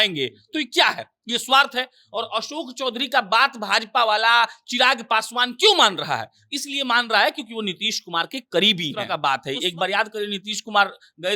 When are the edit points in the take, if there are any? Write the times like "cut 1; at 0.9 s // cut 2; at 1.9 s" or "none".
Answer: cut 1; at 9.1 s